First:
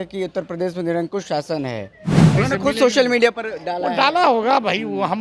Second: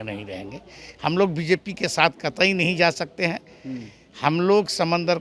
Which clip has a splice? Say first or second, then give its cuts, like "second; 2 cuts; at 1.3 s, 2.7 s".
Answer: first; 1 cut; at 2.3 s